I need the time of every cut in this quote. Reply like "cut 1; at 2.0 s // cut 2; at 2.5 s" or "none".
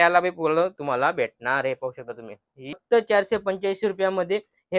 cut 1; at 2.8 s